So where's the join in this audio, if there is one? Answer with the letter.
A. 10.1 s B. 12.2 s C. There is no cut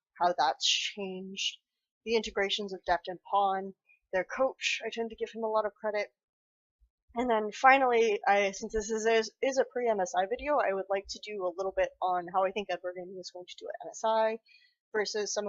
B